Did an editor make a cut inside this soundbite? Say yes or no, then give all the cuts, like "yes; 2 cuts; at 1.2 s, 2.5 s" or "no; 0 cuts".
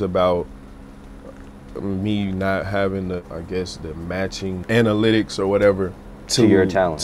yes; 2 cuts; at 3.2 s, 4.6 s